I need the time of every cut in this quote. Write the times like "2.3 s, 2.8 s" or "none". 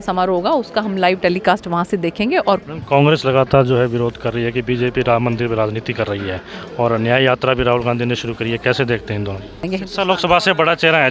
2.6 s, 9.7 s